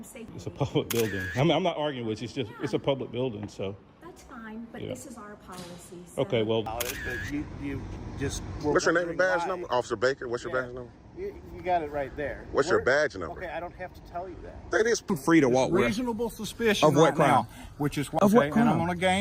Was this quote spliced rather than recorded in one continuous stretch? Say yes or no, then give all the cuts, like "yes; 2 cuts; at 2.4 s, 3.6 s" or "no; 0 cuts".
yes; 2 cuts; at 6.7 s, 15.1 s